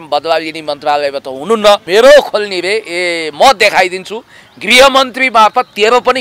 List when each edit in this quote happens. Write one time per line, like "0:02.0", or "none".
0:01.8